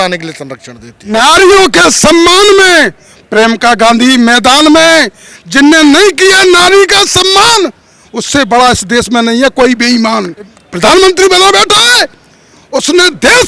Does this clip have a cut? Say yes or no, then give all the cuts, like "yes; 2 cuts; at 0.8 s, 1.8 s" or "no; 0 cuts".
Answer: yes; 2 cuts; at 1.1 s, 10.6 s